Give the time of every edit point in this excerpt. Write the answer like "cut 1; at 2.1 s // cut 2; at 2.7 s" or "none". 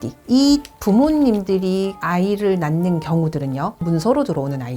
cut 1; at 3.9 s